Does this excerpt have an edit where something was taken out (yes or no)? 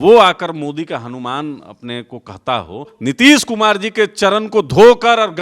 yes